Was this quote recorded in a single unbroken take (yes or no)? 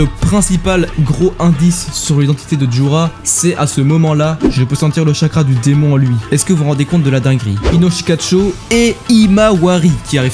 no